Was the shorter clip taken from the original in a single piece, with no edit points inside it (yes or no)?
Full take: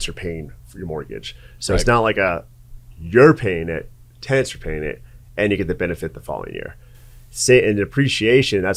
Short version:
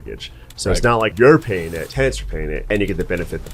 no